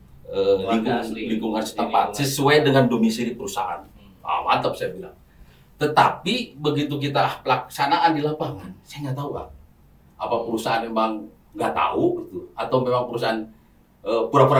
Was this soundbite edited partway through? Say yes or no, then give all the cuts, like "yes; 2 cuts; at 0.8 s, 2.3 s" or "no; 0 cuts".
no; 0 cuts